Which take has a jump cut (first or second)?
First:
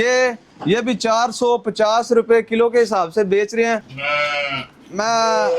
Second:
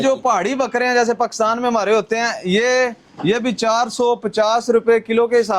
first